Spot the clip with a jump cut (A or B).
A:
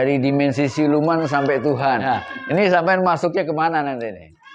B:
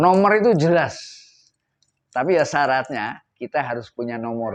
A